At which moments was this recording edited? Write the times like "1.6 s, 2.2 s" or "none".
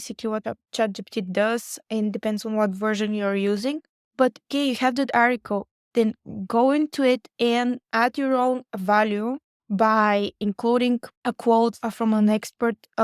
4.5 s, 11.8 s